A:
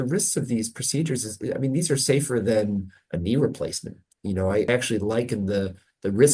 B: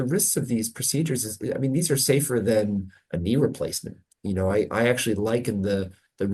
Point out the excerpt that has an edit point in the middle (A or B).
A